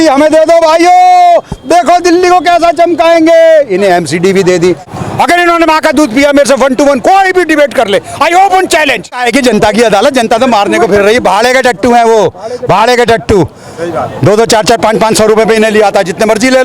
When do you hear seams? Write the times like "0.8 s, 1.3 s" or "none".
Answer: 4.9 s, 9.2 s

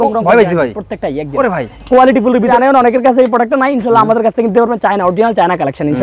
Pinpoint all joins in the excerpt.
2.5 s

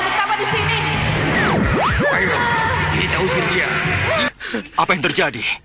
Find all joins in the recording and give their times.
4.3 s

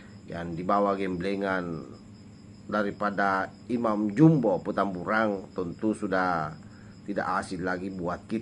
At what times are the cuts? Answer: none

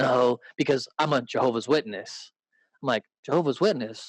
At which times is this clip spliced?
3.1 s

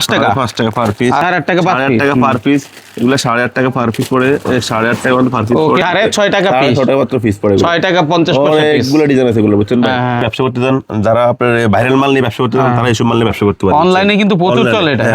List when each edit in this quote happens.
1.2 s, 5.8 s, 10.2 s

